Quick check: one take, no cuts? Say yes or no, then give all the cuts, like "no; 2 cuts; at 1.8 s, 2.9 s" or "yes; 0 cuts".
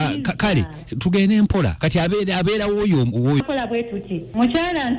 no; 1 cut; at 3.4 s